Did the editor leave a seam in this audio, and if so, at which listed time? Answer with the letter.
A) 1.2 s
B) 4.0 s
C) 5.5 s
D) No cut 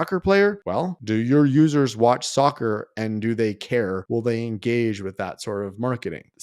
B